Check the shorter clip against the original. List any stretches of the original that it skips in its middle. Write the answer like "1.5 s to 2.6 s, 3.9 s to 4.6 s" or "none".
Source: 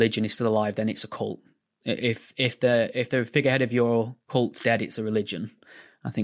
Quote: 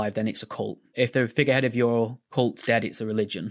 1.5 s to 2.9 s